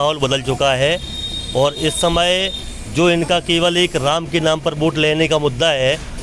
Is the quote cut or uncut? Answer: uncut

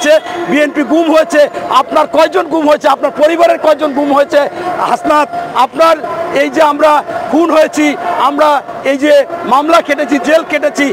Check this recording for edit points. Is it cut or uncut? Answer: uncut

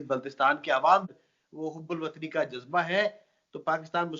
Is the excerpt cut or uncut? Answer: cut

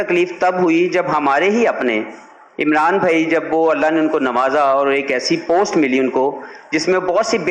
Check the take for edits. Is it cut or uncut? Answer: uncut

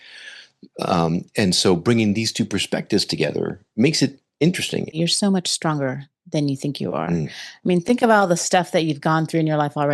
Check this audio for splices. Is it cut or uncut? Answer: cut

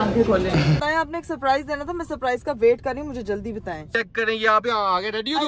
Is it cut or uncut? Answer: cut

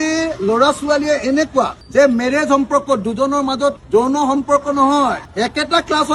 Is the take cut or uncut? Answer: uncut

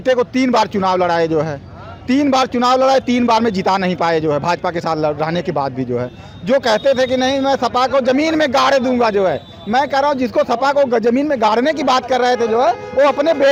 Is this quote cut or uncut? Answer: uncut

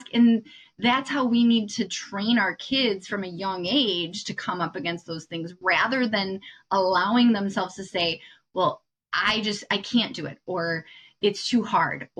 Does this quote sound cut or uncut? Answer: uncut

